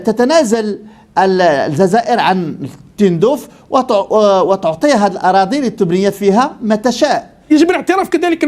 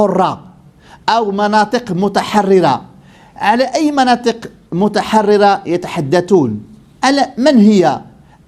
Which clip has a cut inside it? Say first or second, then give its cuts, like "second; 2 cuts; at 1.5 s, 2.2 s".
first; 1 cut; at 7.3 s